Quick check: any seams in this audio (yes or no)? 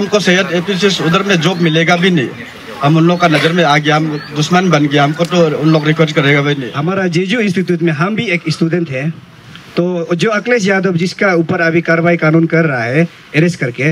yes